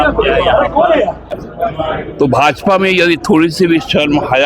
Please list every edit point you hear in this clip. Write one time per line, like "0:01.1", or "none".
0:01.4